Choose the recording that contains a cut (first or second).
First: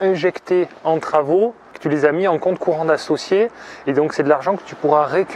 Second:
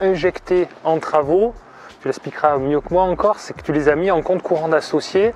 first